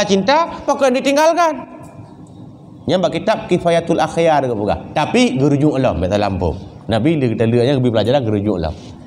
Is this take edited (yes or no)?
no